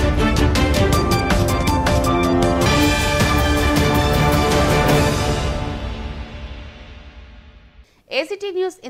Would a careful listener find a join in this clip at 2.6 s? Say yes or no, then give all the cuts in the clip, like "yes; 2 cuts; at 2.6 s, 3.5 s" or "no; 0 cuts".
no; 0 cuts